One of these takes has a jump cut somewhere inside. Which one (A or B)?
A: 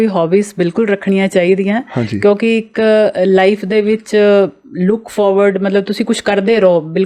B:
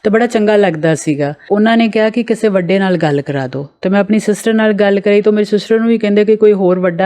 B